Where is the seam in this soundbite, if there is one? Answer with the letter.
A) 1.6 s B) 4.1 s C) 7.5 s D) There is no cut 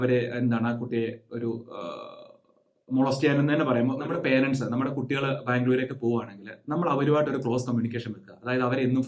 B